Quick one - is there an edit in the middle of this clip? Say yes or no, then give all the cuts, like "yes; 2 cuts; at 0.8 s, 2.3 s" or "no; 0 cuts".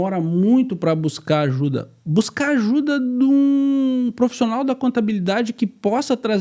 no; 0 cuts